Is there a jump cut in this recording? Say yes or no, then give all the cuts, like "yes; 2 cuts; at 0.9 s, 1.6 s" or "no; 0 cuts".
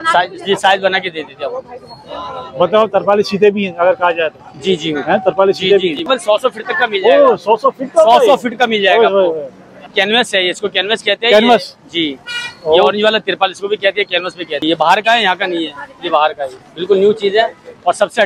yes; 3 cuts; at 6.0 s, 9.8 s, 14.5 s